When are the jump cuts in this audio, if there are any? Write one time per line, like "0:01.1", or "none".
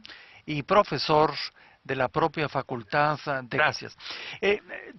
none